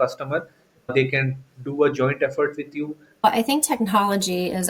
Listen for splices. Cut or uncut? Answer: cut